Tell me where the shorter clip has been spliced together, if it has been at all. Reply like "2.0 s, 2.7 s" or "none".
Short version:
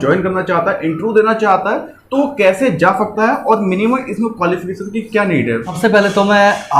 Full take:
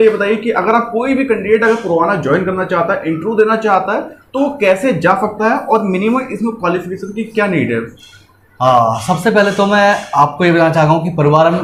5.7 s